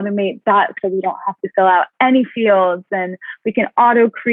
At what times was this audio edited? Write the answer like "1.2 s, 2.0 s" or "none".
none